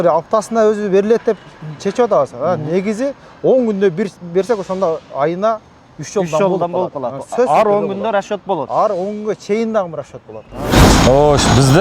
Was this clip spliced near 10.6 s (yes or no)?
yes